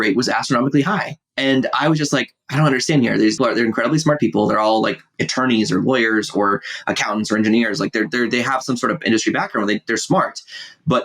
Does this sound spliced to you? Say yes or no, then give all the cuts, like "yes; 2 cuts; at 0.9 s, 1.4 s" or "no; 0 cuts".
yes; 1 cut; at 3.4 s